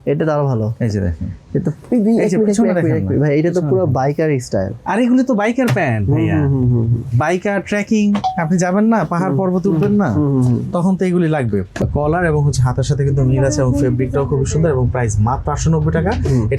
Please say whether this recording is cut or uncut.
cut